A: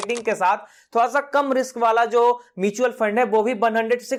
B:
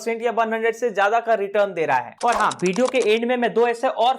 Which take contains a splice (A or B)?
B